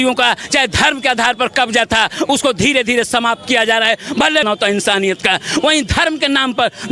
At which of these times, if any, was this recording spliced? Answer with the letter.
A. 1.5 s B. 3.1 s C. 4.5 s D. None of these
C